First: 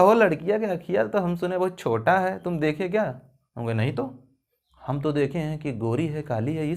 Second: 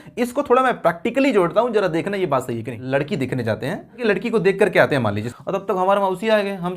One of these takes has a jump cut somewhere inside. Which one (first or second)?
second